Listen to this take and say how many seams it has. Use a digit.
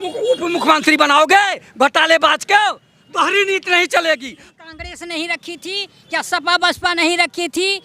1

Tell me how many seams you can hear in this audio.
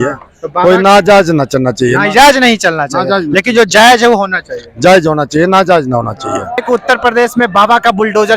1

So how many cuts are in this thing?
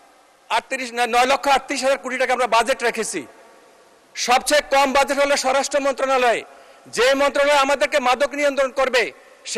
0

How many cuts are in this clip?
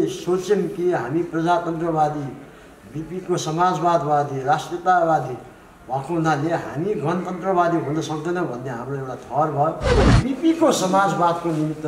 1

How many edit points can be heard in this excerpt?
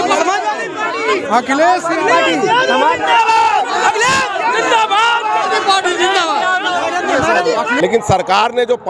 1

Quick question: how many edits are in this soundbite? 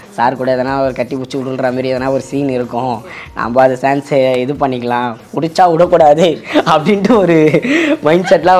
0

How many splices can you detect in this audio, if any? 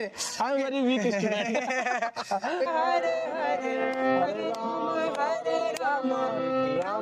1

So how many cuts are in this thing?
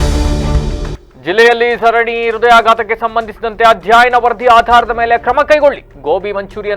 1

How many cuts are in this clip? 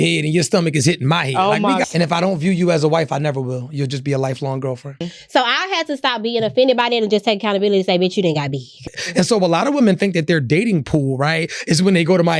3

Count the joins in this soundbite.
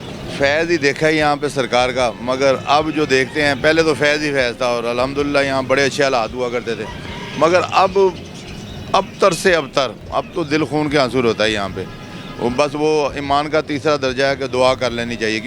0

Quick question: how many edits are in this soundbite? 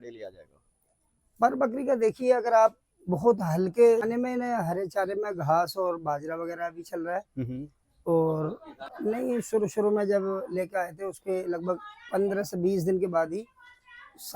2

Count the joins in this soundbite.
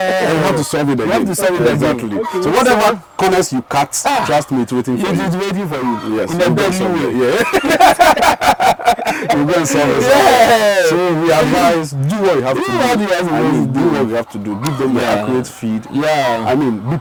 0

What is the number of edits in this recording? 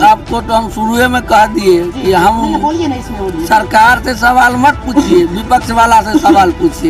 0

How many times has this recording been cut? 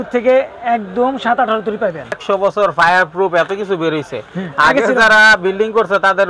1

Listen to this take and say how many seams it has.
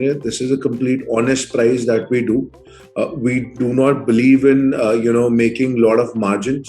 0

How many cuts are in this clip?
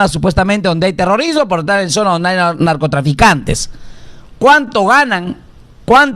0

